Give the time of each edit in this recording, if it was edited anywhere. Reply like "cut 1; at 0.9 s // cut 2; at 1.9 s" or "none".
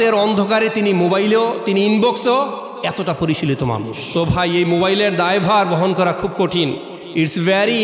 cut 1; at 4.0 s